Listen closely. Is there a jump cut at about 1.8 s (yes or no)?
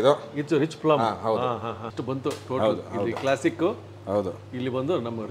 yes